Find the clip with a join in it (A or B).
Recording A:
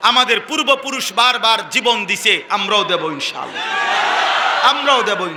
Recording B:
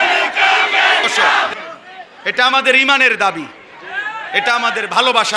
B